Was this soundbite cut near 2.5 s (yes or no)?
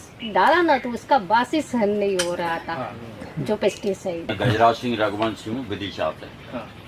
no